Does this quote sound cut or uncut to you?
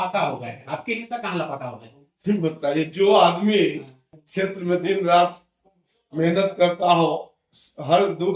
uncut